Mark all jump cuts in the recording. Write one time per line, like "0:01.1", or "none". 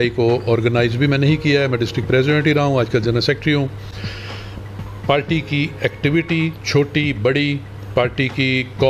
none